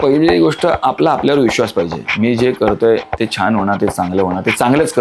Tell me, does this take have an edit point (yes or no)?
no